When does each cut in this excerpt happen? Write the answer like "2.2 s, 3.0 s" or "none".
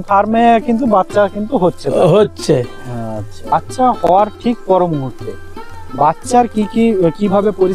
3.5 s